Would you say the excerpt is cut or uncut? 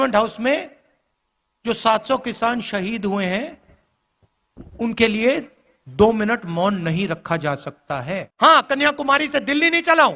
cut